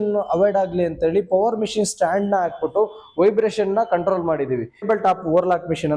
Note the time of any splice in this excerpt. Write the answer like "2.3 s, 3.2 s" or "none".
4.9 s